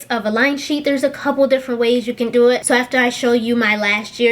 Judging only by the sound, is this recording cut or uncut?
cut